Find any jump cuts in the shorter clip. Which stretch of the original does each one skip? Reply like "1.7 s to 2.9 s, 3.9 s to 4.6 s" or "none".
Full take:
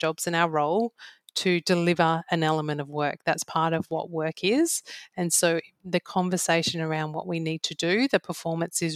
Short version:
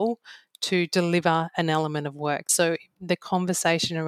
3.2 s to 5.3 s